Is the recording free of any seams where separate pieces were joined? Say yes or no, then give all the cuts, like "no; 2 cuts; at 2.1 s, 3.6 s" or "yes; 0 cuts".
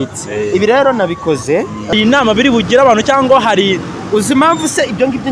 no; 1 cut; at 1.9 s